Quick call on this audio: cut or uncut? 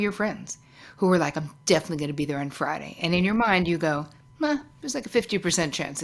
uncut